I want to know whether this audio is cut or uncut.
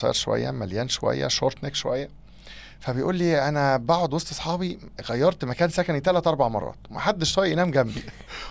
uncut